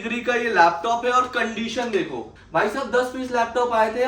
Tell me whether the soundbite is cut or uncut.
cut